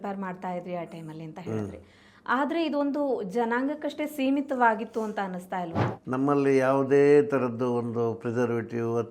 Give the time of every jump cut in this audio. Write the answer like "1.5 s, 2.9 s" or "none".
5.8 s